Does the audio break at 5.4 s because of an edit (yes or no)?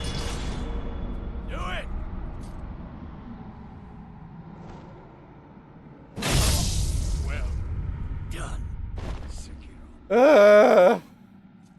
no